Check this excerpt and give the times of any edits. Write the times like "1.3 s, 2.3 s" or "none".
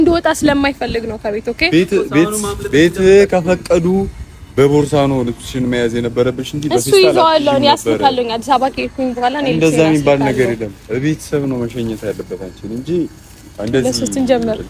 none

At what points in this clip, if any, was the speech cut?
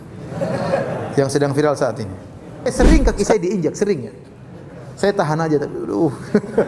2.7 s

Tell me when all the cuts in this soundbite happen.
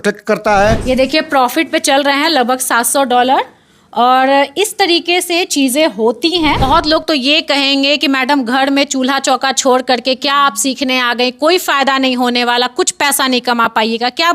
0.8 s, 6.6 s

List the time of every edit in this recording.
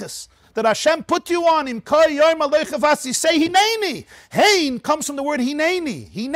none

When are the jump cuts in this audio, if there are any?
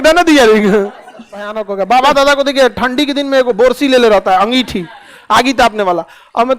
1.6 s

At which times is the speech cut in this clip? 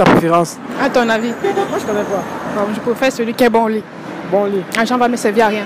4.4 s

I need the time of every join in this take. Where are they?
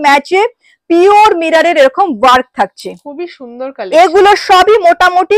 none

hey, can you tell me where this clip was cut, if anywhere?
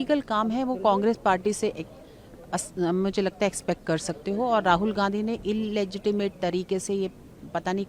none

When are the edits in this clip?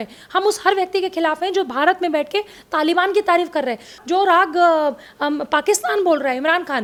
none

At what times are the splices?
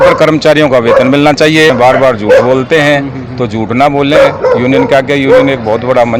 1.7 s

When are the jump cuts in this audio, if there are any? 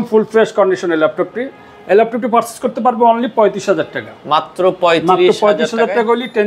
none

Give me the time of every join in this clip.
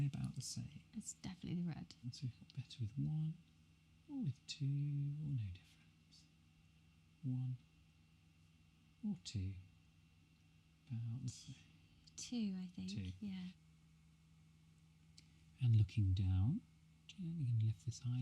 2.1 s, 13.7 s

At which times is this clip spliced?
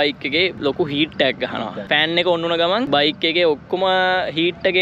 1.8 s

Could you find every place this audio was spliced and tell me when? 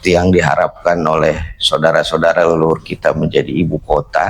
none

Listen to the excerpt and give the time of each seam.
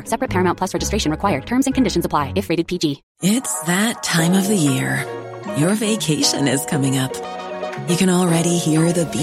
3.1 s

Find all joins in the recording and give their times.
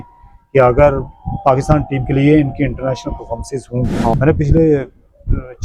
4.1 s

